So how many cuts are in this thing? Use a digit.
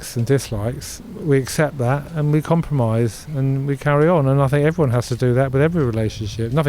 1